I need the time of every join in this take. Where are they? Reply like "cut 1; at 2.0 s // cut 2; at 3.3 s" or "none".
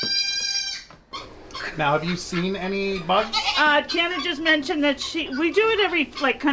cut 1; at 1.1 s